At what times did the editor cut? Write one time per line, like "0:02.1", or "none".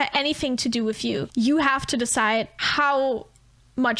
0:01.3
0:02.6

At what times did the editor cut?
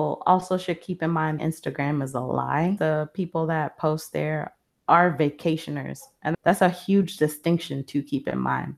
0:01.4
0:06.3

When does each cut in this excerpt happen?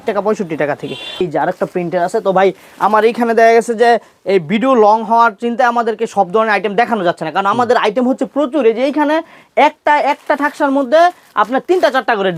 none

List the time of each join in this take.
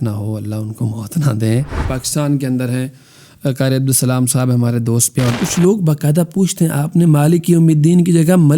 0:01.8
0:05.4

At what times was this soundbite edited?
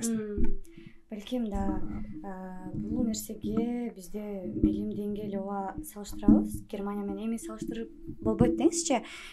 none

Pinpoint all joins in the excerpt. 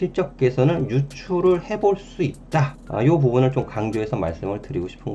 0:02.8

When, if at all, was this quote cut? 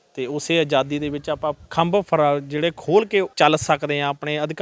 0:01.6
0:03.3

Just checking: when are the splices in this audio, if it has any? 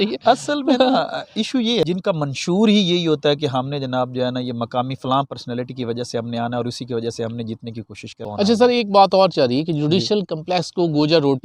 0:01.8
0:08.2

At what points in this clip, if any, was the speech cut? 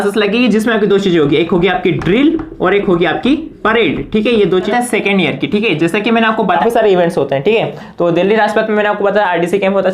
0:04.6
0:06.4

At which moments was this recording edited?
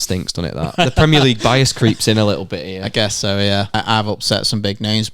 0:03.7

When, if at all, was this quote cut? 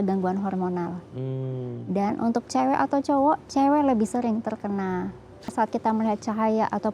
0:05.5

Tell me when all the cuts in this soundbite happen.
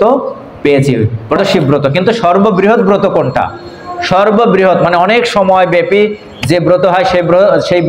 0:01.4

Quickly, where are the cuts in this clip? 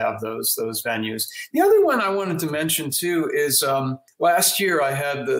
0:04.0

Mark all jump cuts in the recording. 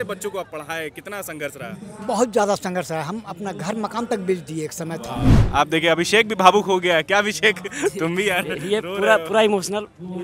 0:05.3

